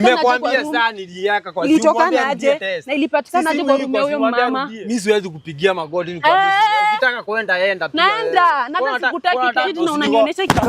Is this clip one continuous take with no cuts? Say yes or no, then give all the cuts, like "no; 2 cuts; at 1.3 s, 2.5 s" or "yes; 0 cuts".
no; 2 cuts; at 4.7 s, 9.7 s